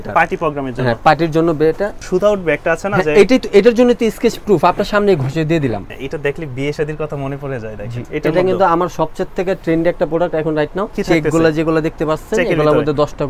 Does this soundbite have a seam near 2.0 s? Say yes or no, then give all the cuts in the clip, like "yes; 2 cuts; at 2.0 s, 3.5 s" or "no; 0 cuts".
yes; 4 cuts; at 2.0 s, 5.9 s, 8.0 s, 11.0 s